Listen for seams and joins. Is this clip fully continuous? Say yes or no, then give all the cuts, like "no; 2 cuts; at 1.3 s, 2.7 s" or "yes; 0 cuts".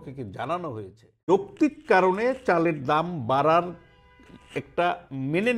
no; 1 cut; at 1.2 s